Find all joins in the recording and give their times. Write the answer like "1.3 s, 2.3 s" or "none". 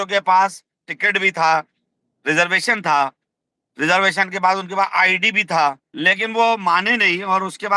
5.9 s